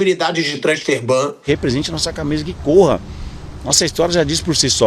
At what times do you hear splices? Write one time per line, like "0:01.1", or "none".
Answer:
0:01.4